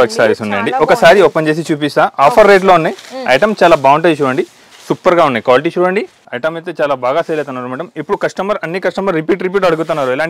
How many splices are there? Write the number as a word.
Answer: one